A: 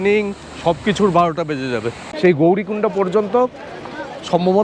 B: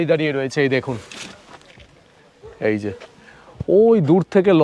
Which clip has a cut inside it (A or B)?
A